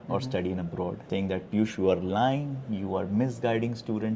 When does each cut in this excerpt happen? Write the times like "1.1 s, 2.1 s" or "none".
1.0 s